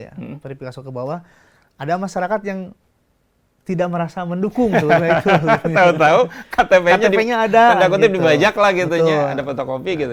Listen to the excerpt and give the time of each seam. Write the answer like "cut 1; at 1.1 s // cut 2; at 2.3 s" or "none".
none